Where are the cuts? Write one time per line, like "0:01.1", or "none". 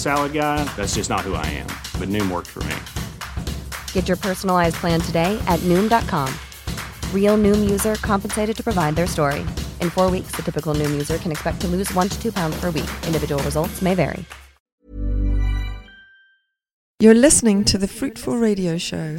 0:17.0

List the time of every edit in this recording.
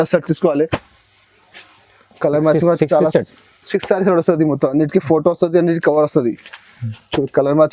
none

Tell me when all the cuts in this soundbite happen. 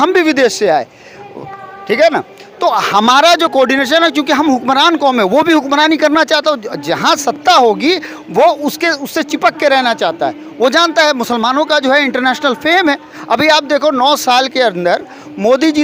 none

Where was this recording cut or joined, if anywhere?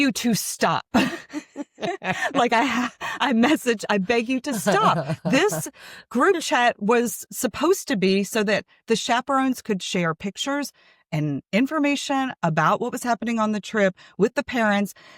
none

